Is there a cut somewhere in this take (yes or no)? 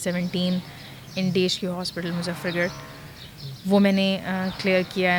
no